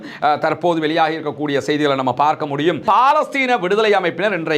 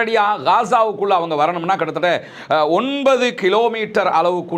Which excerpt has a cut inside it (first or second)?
first